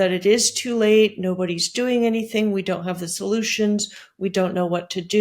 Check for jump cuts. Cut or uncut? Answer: uncut